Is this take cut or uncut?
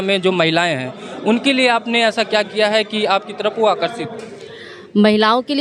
uncut